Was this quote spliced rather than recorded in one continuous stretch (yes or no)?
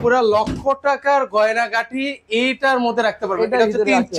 no